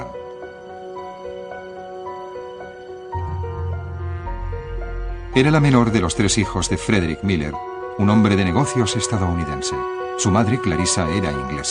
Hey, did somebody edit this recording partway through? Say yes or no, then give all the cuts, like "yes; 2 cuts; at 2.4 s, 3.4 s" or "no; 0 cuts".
yes; 1 cut; at 8.9 s